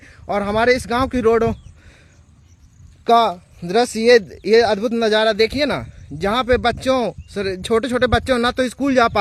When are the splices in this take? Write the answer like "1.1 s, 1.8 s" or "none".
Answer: none